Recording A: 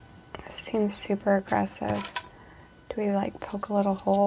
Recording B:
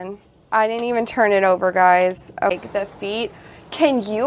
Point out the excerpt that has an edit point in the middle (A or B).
B